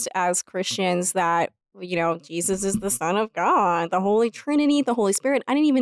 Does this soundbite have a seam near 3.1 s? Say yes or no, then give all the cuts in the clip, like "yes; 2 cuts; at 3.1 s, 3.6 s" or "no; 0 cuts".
no; 0 cuts